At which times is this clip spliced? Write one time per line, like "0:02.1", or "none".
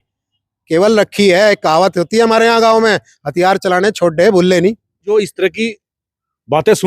0:05.1